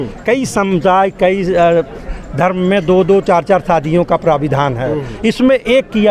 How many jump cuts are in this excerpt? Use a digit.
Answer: 0